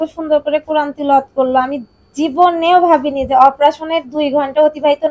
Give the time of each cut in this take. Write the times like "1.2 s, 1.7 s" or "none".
none